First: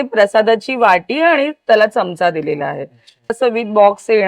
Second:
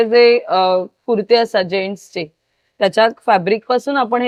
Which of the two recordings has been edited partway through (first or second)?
first